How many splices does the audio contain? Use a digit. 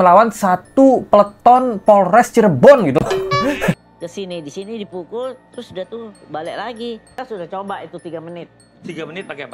2